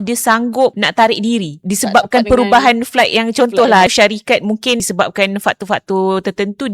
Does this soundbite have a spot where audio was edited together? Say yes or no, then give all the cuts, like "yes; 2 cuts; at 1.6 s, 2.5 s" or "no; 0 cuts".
yes; 4 cuts; at 0.8 s, 1.6 s, 3.9 s, 4.9 s